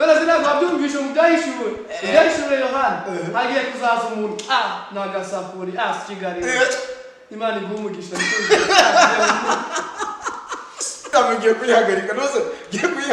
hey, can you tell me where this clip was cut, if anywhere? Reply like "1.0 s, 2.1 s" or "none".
11.1 s